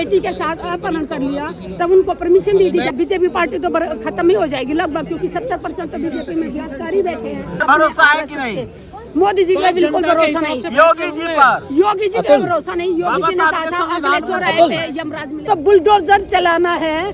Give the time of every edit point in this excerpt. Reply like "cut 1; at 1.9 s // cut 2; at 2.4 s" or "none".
cut 1; at 2.9 s // cut 2; at 7.6 s // cut 3; at 15.3 s